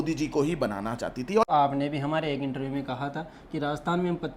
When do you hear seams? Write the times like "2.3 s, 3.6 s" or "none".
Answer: 1.4 s